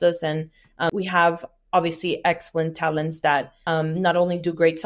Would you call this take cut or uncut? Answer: cut